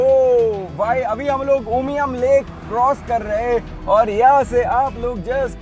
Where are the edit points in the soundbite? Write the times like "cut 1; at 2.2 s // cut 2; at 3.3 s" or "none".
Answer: none